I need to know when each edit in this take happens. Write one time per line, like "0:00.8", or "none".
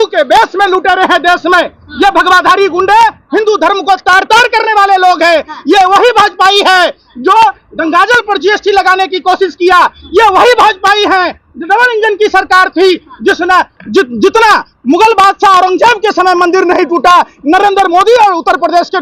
none